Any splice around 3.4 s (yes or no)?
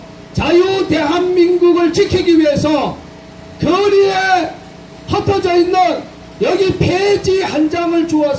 no